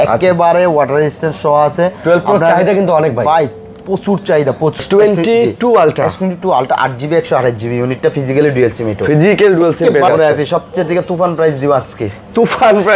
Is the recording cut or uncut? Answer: cut